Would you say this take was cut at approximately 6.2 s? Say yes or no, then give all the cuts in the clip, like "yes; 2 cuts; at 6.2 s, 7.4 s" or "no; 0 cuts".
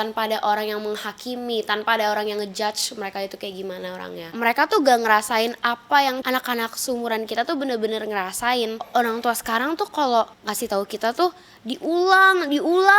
yes; 4 cuts; at 4.3 s, 6.2 s, 8.9 s, 10.4 s